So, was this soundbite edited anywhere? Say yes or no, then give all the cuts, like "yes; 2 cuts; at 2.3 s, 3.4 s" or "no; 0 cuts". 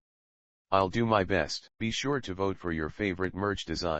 yes; 1 cut; at 1.6 s